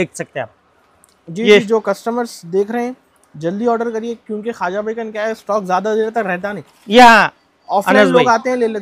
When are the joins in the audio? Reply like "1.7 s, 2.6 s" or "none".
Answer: none